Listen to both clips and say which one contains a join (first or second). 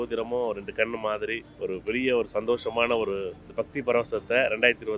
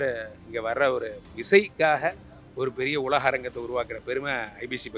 first